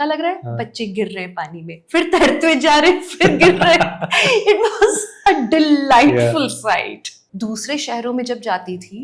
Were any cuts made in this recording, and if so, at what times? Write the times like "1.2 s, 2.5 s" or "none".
7.2 s